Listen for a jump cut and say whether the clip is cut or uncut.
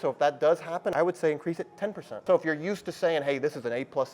cut